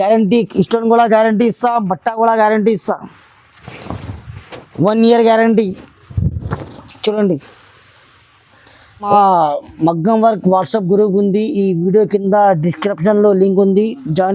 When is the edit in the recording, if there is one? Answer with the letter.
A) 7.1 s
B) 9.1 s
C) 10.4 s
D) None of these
B